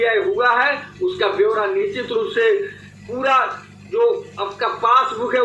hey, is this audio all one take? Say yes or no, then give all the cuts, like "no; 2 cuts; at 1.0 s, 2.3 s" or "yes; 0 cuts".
yes; 0 cuts